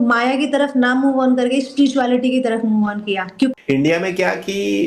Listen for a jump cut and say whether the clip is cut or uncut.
cut